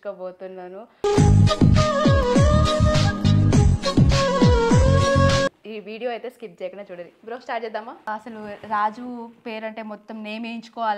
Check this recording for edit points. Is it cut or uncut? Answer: cut